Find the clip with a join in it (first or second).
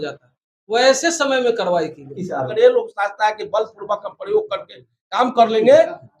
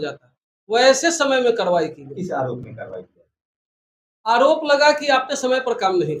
first